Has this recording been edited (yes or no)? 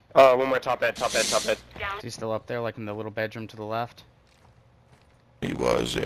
yes